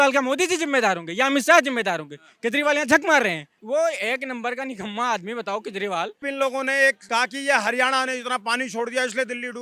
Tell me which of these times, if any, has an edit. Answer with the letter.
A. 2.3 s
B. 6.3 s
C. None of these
B